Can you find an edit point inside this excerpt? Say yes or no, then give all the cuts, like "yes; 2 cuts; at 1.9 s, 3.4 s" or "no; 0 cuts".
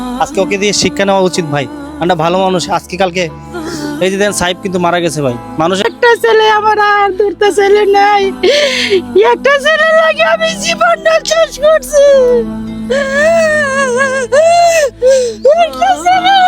yes; 1 cut; at 5.8 s